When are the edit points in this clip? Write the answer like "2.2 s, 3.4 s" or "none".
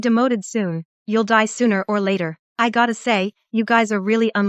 none